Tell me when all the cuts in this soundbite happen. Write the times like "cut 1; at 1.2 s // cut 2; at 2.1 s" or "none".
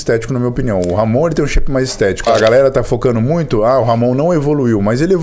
cut 1; at 2.3 s